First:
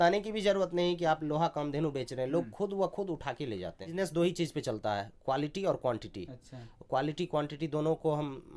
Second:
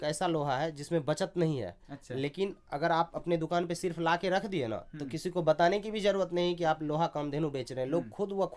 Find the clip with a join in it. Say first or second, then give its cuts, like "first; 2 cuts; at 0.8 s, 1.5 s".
first; 1 cut; at 3.9 s